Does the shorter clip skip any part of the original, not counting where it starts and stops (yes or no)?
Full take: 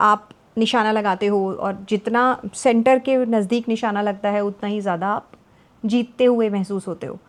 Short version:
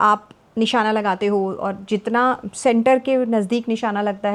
no